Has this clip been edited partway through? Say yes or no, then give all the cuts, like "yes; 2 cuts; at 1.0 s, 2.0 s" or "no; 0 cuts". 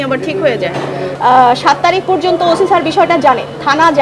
yes; 1 cut; at 1.1 s